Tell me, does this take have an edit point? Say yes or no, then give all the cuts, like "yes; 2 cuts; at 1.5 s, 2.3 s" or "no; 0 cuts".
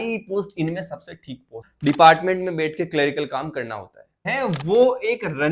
yes; 2 cuts; at 1.6 s, 4.3 s